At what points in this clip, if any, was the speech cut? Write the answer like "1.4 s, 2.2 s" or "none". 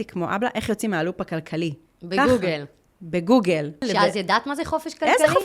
3.8 s